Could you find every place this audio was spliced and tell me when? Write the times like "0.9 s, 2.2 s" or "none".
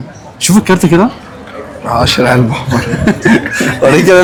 none

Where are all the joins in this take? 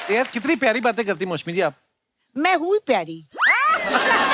none

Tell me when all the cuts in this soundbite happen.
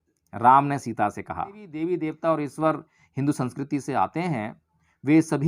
1.7 s

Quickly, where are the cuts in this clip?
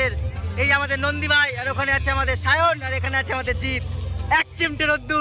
none

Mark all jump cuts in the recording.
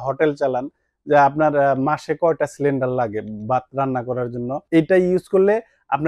4.6 s

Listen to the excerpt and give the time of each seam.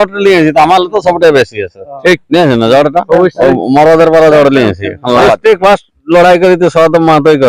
5.2 s

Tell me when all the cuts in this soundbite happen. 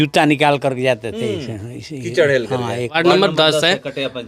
3.0 s

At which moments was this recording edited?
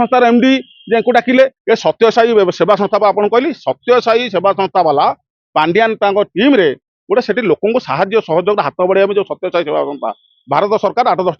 1.6 s

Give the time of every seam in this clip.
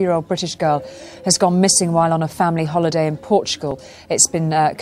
none

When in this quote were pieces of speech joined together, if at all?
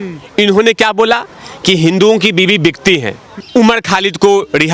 3.4 s

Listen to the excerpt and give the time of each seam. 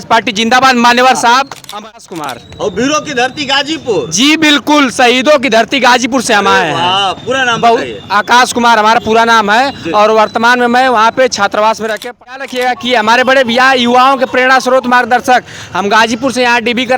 2.0 s, 12.3 s

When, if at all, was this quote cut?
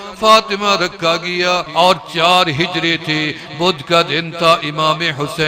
1.7 s

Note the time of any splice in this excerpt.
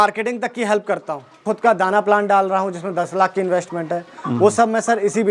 1.4 s

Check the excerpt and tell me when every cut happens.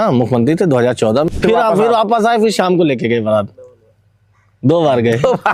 1.3 s

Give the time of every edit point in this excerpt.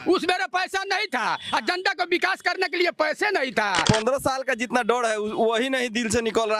3.8 s

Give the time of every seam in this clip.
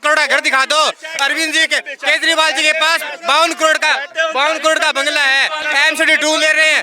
none

